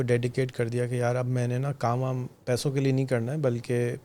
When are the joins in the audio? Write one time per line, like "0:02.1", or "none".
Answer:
none